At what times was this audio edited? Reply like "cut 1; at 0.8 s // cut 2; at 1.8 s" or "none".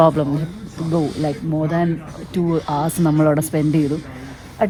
none